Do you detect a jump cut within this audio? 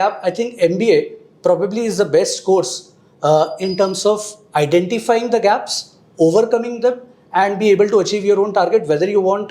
no; 0 cuts

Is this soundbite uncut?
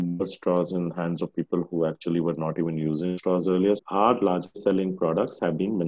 no; 1 cut; at 3.8 s

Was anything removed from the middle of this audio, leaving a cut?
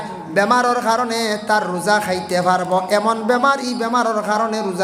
no; 0 cuts

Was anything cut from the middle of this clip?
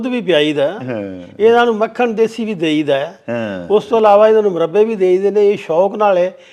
no; 0 cuts

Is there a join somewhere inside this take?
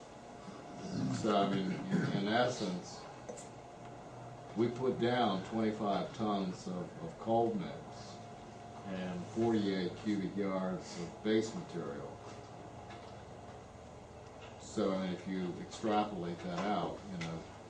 yes; 1 cut; at 13.8 s

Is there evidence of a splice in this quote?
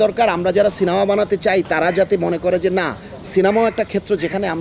no; 0 cuts

